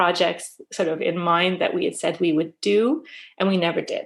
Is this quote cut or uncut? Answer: uncut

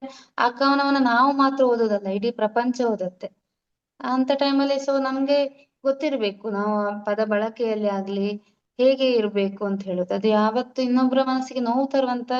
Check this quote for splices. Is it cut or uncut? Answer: uncut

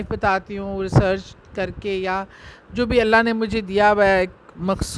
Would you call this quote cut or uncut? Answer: uncut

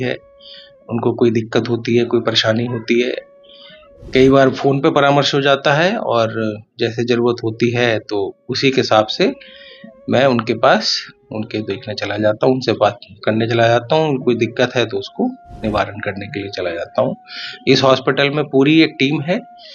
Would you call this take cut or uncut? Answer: uncut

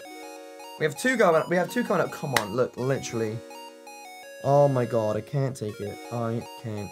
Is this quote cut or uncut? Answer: cut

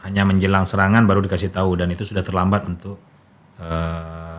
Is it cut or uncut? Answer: uncut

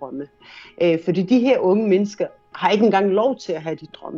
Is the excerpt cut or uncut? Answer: uncut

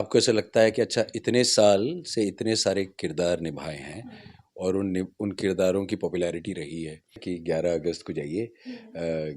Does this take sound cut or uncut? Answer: cut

